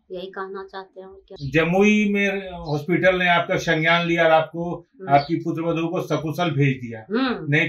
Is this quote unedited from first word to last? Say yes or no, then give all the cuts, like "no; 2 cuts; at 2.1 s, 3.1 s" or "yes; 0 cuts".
no; 1 cut; at 1.2 s